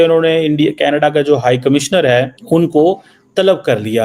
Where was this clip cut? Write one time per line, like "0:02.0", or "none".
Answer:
0:02.4